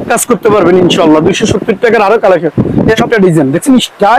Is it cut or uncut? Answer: cut